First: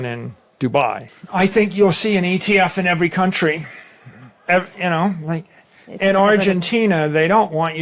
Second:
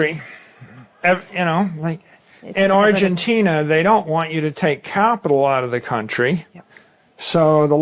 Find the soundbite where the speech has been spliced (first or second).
first